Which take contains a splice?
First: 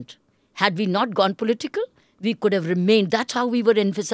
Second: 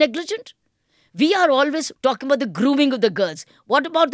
second; 1 cut; at 1.9 s

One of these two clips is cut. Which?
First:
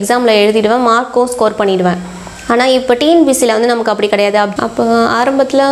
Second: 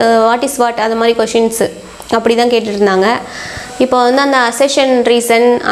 first; 1 cut; at 4.5 s

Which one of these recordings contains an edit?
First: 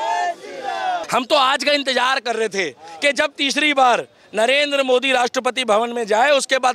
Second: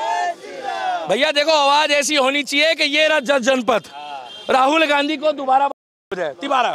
first; 1 cut; at 1.0 s

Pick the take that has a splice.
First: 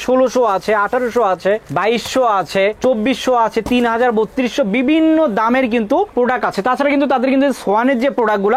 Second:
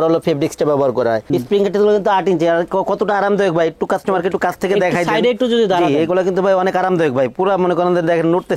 second; 1 cut; at 1.2 s

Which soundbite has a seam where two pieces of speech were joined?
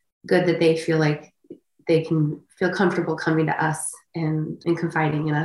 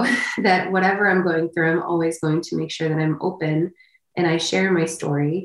first; 1 cut; at 4.5 s

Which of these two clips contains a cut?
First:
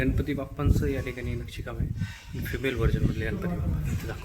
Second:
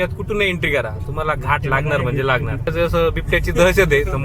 second; 1 cut; at 2.7 s

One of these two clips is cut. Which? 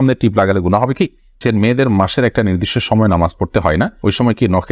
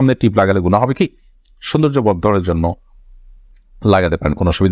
first; 1 cut; at 1.4 s

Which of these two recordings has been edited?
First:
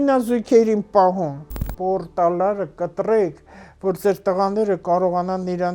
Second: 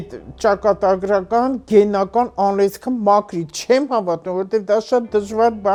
first; 1 cut; at 1.7 s

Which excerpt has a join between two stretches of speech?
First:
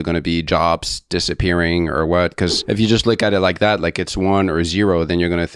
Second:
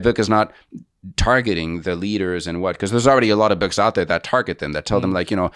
first; 1 cut; at 2.6 s

